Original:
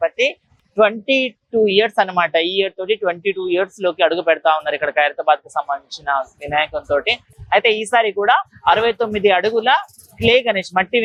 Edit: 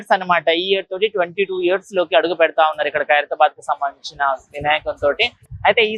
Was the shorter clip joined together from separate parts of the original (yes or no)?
no